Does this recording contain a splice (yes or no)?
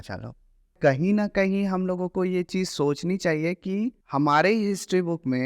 yes